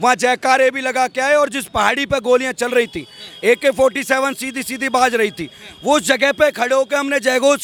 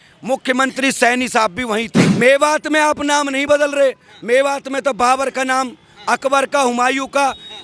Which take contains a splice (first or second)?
second